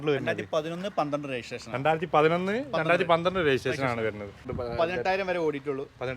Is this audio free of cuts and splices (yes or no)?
no